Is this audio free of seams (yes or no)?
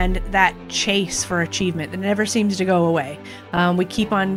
yes